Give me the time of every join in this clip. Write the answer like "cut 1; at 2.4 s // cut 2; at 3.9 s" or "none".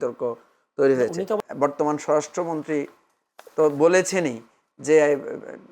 cut 1; at 1.4 s